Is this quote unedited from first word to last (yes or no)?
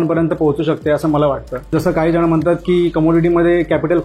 no